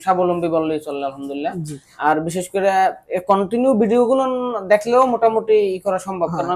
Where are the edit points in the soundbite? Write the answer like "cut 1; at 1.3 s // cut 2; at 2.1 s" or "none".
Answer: none